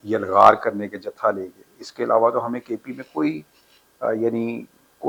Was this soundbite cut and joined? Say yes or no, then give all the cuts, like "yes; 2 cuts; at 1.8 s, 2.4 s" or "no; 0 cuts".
no; 0 cuts